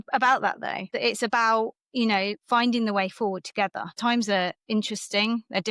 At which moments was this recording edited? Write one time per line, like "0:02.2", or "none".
0:00.9
0:03.9